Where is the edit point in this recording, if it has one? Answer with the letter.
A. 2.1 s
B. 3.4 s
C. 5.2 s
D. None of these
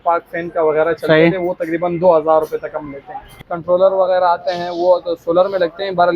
B